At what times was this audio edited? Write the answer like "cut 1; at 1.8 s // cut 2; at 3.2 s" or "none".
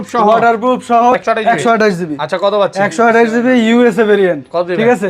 cut 1; at 1.1 s

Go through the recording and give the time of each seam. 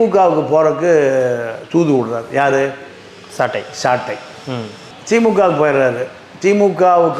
none

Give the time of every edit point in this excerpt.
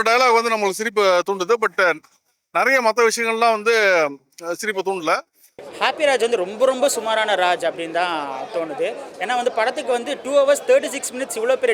none

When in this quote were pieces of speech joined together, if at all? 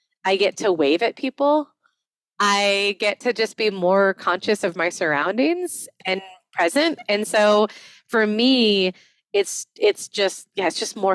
none

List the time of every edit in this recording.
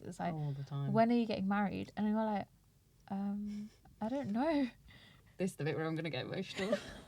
cut 1; at 5.1 s

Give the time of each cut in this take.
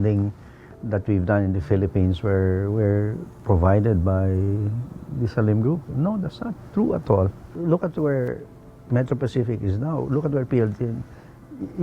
cut 1; at 7.4 s

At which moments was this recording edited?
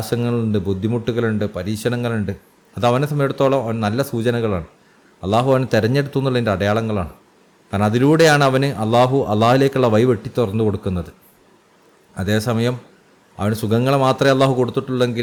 none

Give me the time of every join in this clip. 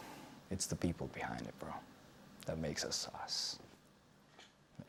none

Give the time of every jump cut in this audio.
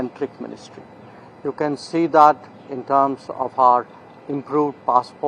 none

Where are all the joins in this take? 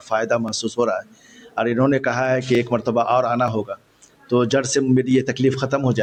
none

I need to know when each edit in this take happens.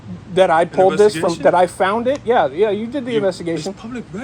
none

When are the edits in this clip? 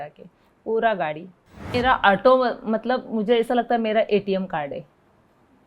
cut 1; at 1.7 s

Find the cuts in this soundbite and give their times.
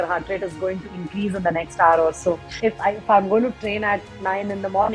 cut 1; at 2.6 s

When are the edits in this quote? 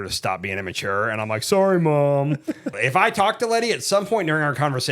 cut 1; at 2.7 s

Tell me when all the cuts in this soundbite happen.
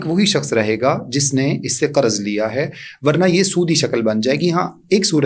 none

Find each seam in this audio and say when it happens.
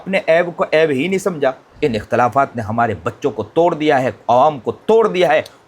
cut 1; at 1.7 s

